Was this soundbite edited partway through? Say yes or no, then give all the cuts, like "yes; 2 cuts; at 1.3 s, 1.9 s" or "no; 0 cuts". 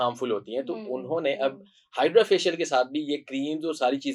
no; 0 cuts